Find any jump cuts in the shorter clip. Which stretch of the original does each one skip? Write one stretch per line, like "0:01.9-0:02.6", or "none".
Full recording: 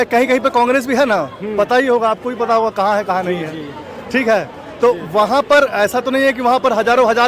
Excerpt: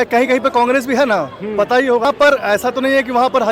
0:02.0-0:05.3